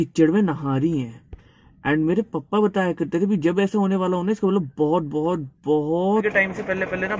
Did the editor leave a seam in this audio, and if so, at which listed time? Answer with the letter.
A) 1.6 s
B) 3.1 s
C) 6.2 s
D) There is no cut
C